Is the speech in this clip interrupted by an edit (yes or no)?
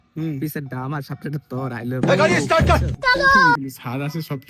yes